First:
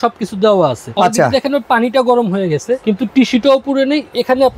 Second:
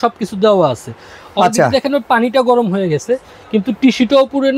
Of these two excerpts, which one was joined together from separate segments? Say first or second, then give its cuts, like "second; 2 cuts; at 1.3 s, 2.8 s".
first; 2 cuts; at 0.8 s, 2.8 s